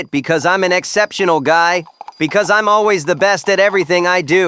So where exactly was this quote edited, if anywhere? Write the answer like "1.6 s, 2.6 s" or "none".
none